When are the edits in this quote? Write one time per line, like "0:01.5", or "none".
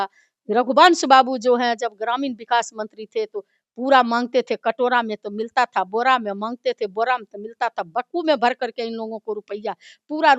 none